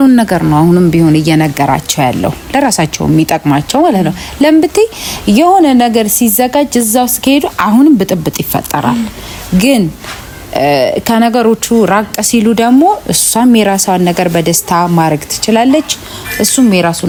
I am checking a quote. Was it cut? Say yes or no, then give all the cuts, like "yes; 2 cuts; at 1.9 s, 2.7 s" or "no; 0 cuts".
no; 0 cuts